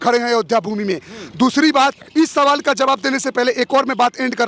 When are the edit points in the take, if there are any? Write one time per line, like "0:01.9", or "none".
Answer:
none

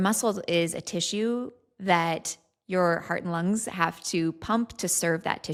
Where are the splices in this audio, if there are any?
none

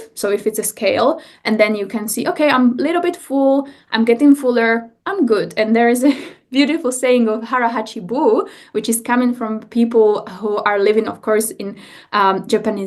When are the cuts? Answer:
none

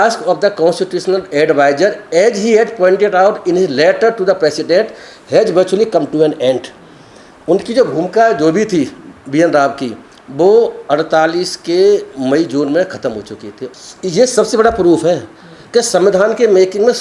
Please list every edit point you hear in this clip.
0:13.6

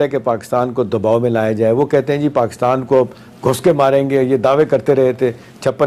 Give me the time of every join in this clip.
none

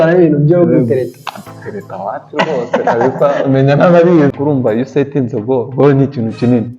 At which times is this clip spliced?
0:04.3

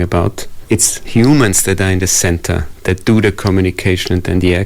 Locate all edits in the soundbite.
0:01.0

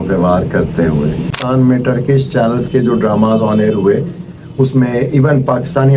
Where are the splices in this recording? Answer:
0:01.3

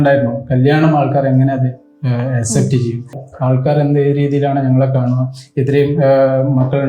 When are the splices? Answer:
0:03.2

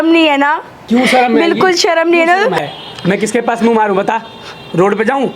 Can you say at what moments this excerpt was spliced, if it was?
0:02.6

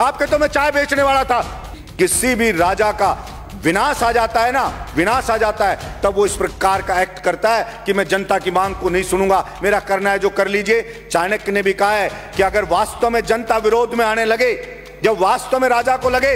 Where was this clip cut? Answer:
0:01.8

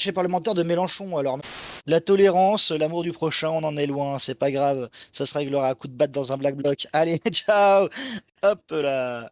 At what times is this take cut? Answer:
0:01.8

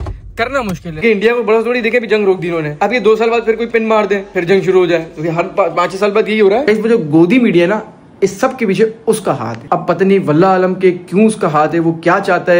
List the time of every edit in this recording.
0:00.9
0:06.6

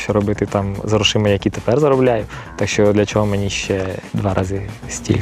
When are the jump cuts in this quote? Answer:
0:04.0

